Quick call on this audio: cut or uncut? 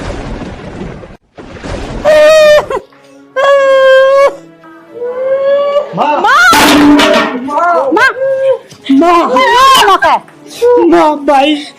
cut